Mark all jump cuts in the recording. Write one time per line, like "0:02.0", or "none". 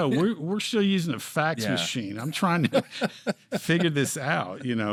none

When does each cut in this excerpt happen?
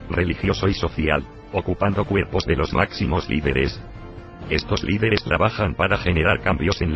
none

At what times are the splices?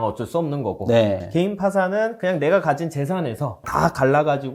0:03.6

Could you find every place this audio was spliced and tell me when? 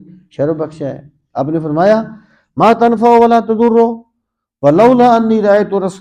none

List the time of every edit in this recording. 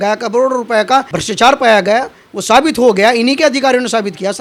none

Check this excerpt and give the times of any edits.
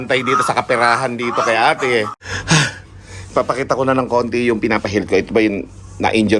0:02.1

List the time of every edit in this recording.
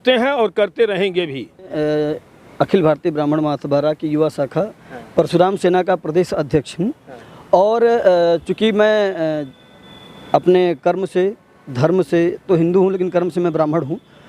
0:01.7

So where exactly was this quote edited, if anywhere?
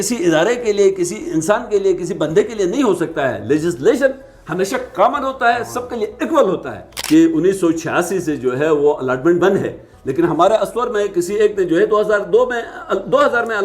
0:06.9

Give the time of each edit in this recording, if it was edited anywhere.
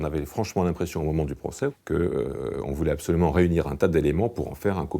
0:01.8

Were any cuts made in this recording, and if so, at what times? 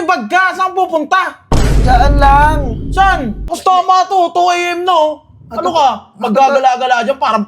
0:03.4

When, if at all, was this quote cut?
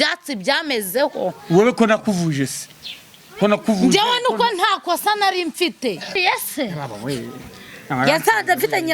0:06.2

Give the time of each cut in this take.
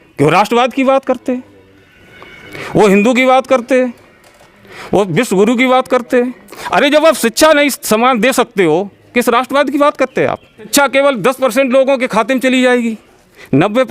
0:10.7

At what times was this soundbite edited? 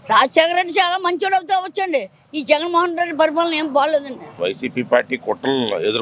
0:04.4

